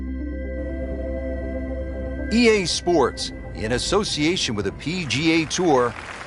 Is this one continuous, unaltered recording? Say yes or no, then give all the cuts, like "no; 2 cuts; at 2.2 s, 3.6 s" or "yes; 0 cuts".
no; 1 cut; at 2.3 s